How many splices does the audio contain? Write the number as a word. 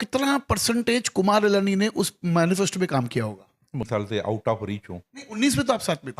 one